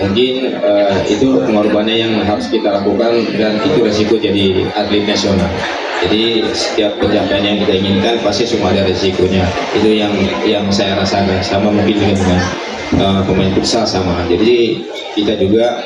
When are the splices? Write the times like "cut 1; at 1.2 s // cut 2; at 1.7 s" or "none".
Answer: none